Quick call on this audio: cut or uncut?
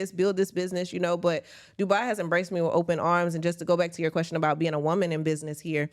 uncut